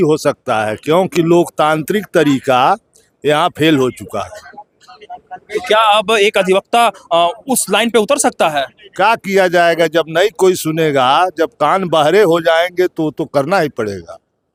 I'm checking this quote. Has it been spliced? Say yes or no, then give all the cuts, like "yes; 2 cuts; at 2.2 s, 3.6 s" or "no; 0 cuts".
no; 0 cuts